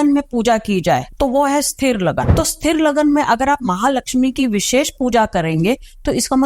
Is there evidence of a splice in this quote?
yes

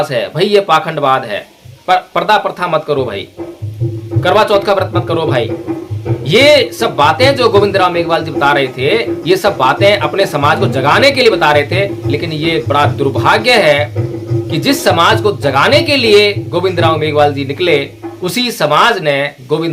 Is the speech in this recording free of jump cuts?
yes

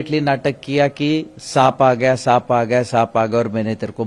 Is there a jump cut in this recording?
no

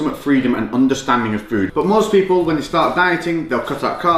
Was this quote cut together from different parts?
yes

